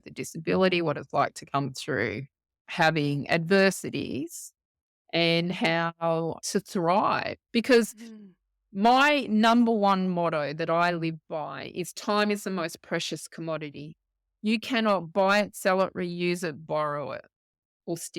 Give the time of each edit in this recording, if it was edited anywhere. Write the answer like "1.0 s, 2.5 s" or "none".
2.6 s, 6.4 s, 7.4 s

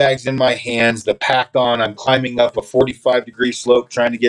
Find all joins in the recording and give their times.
none

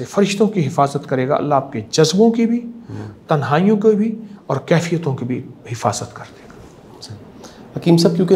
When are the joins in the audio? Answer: none

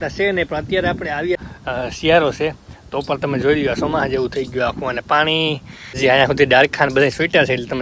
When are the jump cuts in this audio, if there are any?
1.4 s, 5.8 s

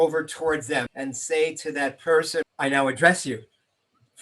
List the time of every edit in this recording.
0.9 s, 2.5 s

